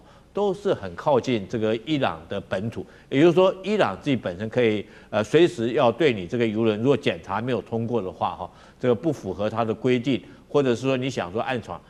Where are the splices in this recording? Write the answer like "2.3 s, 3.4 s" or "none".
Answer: none